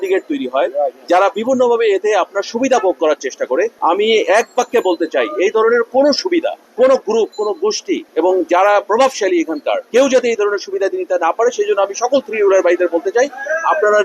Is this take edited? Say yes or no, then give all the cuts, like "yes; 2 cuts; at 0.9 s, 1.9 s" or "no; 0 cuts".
no; 0 cuts